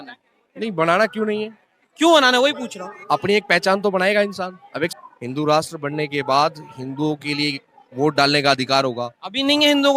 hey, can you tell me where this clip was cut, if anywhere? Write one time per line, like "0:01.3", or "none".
0:04.9